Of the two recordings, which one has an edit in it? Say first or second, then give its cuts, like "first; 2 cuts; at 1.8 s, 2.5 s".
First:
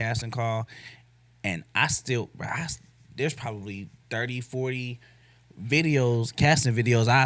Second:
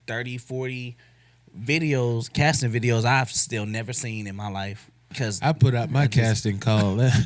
second; 1 cut; at 5.1 s